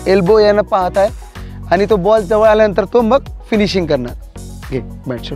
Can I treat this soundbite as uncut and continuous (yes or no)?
yes